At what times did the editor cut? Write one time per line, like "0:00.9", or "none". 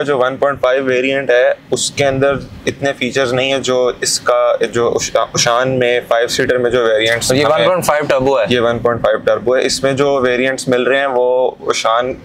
none